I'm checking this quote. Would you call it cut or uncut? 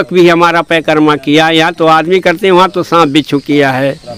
uncut